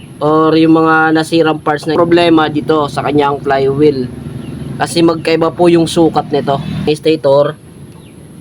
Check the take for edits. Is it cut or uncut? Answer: cut